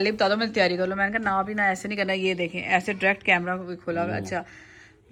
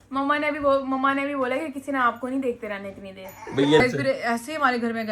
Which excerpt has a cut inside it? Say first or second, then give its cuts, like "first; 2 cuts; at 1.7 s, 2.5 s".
second; 1 cut; at 3.8 s